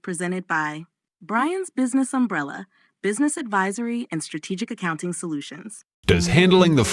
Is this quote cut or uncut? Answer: uncut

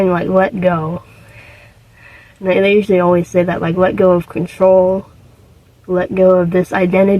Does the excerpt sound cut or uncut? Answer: uncut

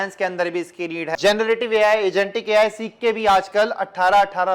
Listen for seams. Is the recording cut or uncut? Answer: cut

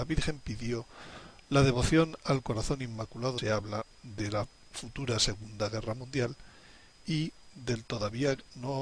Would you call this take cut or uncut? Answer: uncut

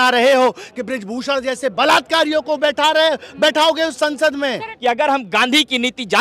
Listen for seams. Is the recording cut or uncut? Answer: cut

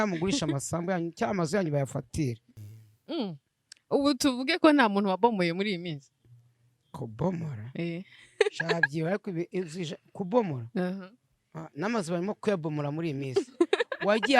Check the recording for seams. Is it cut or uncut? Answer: cut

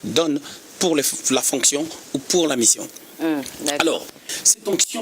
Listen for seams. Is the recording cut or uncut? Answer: uncut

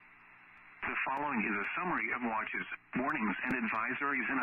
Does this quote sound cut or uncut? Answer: uncut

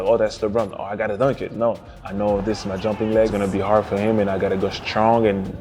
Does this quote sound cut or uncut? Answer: cut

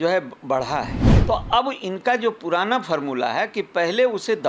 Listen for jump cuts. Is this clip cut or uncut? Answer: cut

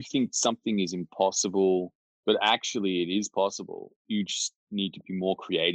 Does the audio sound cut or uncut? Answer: uncut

